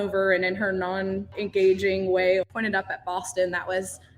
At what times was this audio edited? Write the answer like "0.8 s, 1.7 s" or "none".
1.3 s, 2.5 s